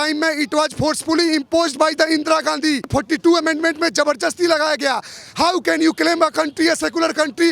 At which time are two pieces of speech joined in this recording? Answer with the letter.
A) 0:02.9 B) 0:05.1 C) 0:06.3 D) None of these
A